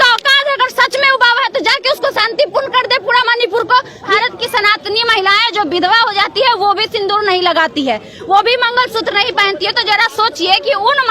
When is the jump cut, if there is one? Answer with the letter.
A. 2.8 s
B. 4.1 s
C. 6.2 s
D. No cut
B